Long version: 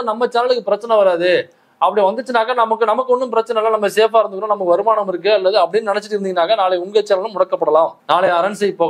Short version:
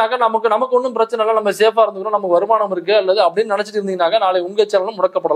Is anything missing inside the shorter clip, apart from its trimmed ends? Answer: no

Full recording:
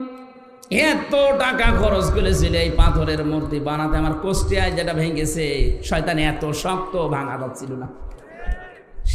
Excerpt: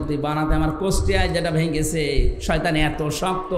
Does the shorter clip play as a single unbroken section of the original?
yes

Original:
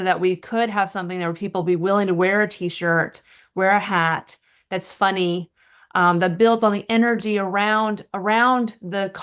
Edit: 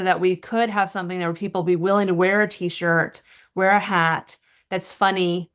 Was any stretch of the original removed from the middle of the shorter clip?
no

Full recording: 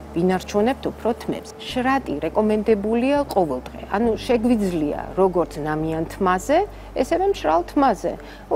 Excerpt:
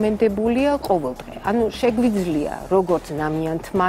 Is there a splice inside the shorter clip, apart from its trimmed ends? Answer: no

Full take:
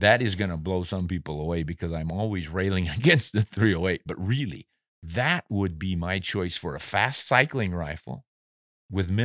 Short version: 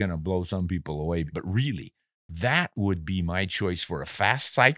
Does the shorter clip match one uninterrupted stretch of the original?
no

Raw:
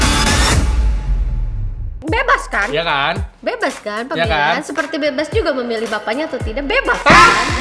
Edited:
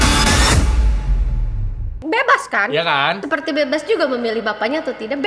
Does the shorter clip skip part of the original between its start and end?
yes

